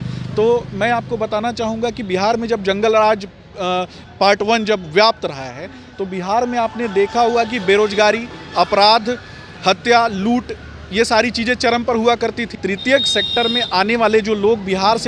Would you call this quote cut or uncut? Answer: cut